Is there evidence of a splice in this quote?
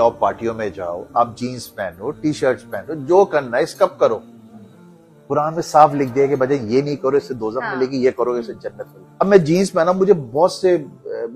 no; 0 cuts

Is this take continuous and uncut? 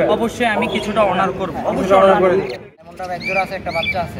no; 1 cut; at 2.8 s

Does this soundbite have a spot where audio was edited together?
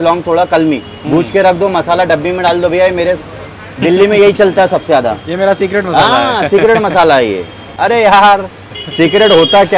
no; 0 cuts

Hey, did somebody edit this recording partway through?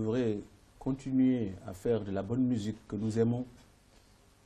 no; 0 cuts

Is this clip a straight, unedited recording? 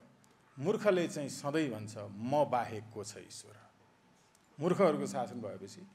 yes; 0 cuts

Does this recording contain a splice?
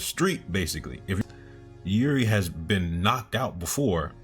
yes; 1 cut; at 1.2 s

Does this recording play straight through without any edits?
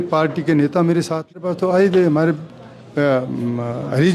no; 1 cut; at 1.4 s

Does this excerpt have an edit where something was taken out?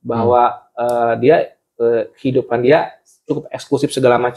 no; 0 cuts

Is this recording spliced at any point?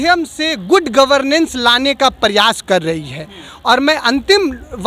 no; 0 cuts

